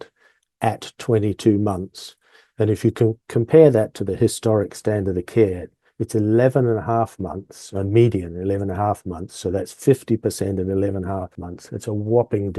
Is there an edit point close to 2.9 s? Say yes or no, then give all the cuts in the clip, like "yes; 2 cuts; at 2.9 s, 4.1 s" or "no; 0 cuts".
no; 1 cut; at 11.4 s